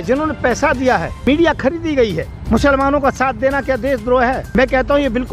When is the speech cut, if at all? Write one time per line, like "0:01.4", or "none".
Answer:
0:01.3
0:02.3
0:04.5